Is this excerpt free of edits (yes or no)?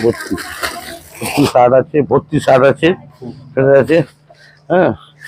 yes